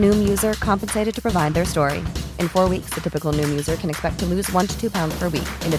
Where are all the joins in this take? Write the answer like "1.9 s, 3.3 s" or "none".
none